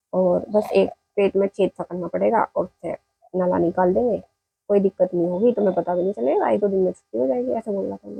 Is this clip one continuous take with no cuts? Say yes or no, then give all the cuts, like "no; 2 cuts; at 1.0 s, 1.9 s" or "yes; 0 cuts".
yes; 0 cuts